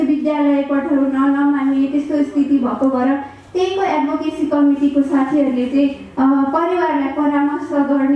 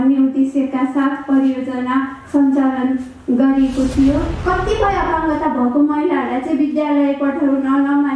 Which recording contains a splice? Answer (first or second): second